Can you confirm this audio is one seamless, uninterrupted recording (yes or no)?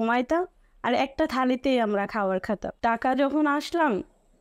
no